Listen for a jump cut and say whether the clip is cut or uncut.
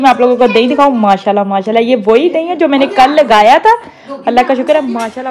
uncut